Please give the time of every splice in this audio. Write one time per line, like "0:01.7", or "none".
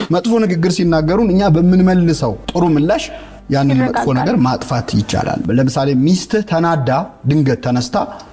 0:05.4